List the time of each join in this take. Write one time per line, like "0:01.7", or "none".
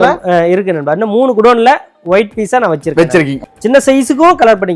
0:03.4